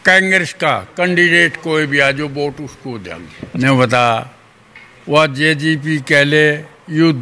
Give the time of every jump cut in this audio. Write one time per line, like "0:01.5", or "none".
0:03.4